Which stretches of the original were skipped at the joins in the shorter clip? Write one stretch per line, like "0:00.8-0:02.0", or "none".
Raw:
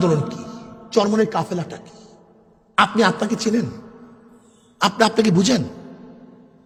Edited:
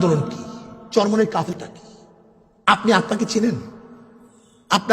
0:01.5-0:01.6